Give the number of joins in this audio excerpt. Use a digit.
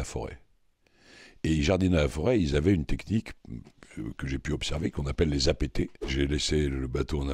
1